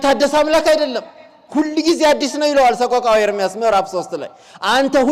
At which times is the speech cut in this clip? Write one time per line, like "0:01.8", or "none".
none